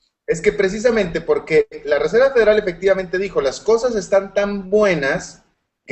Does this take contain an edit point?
no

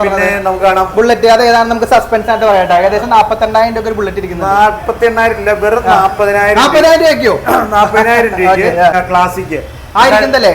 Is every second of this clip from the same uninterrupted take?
no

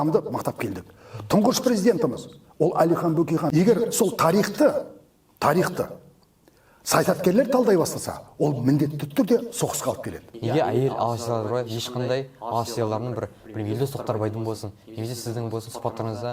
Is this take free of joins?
no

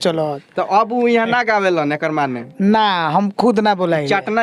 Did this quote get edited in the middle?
no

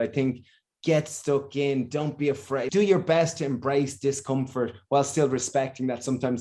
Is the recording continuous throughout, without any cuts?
no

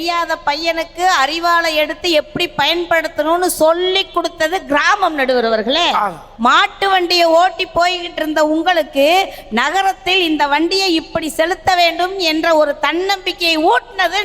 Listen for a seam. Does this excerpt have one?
yes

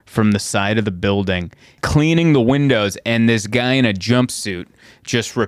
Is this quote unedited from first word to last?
no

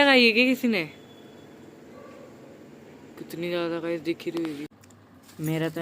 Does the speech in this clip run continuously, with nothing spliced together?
no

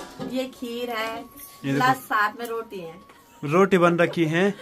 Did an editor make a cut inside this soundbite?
no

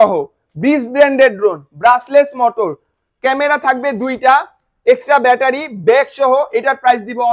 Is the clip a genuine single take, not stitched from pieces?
yes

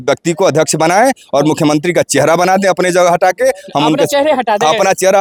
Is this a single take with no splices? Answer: yes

